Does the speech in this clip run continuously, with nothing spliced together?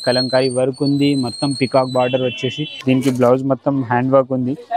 no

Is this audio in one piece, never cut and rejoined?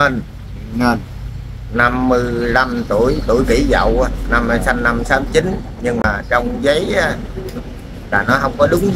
yes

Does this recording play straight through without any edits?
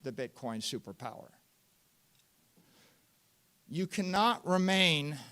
yes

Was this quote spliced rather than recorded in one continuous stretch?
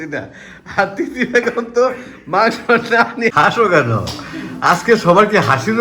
yes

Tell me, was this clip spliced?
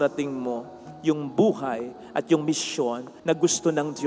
yes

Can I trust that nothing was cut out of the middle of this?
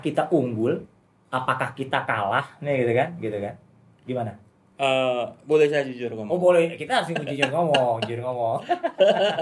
yes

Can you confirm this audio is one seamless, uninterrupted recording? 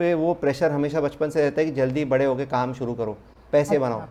yes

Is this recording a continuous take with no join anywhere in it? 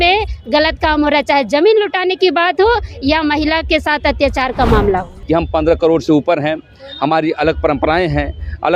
no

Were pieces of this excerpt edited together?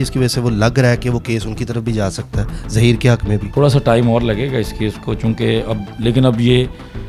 yes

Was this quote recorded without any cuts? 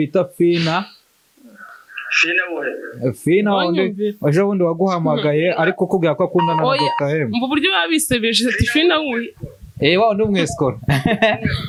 yes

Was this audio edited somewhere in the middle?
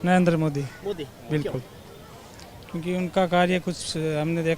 no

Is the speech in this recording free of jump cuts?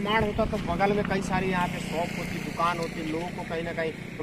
yes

